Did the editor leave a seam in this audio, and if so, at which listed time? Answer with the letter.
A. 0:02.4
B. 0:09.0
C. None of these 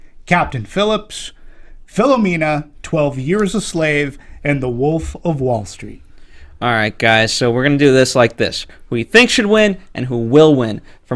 A